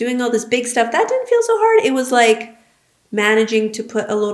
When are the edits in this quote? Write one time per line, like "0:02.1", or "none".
none